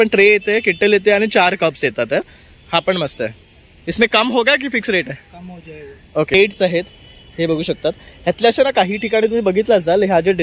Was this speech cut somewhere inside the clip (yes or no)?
yes